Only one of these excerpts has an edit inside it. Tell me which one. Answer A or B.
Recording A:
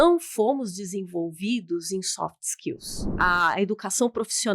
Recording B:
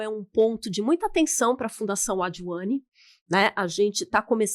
A